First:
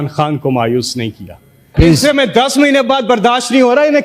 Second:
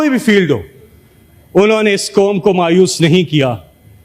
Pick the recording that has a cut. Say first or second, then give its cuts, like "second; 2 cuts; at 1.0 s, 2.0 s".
first; 1 cut; at 1.7 s